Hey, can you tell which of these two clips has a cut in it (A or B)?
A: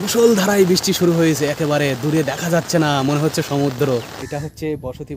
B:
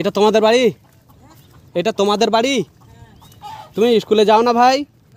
A